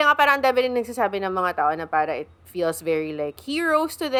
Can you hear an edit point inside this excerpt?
no; 0 cuts

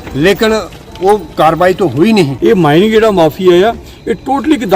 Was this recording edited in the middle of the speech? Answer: yes; 1 cut; at 2.3 s

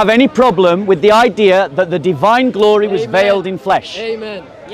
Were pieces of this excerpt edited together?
no; 0 cuts

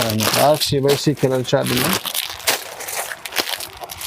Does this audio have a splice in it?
no; 0 cuts

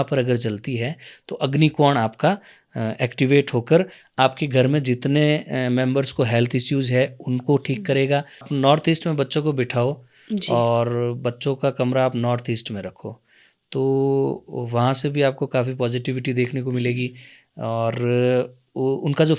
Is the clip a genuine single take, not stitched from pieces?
no; 1 cut; at 8.5 s

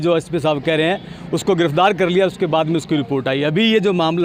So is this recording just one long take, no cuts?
yes; 0 cuts

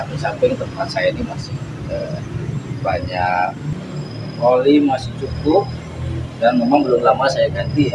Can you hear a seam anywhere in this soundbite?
yes; 1 cut; at 3.7 s

